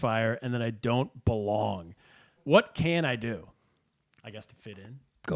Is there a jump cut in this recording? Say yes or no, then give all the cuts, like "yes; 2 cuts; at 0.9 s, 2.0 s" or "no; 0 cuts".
yes; 1 cut; at 2.4 s